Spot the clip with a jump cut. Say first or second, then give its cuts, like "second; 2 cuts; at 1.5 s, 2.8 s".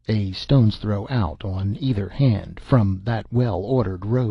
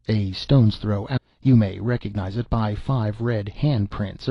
first; 1 cut; at 1.1 s